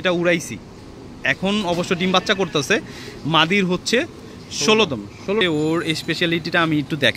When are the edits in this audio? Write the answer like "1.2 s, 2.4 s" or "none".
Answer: 5.4 s